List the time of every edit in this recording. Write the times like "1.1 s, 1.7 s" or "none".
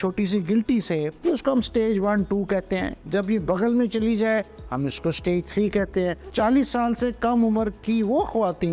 1.1 s, 6.2 s